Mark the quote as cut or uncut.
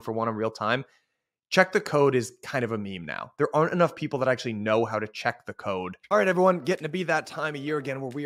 cut